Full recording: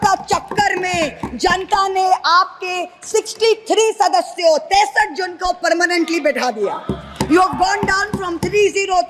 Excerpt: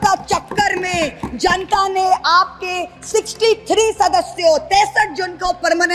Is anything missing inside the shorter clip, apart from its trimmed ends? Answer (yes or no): no